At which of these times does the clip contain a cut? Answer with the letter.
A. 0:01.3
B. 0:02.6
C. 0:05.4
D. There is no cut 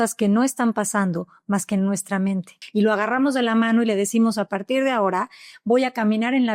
B